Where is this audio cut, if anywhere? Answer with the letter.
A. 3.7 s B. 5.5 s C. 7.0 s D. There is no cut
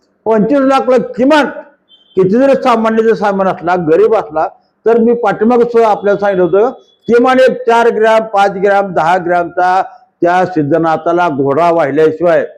D